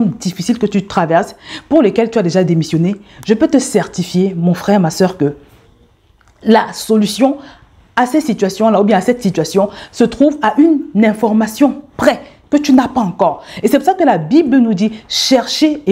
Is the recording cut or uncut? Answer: uncut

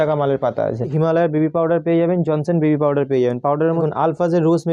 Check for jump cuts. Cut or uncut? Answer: cut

